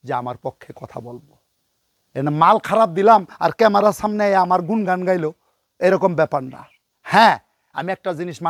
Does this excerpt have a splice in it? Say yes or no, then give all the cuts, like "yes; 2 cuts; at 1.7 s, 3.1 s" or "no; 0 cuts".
no; 0 cuts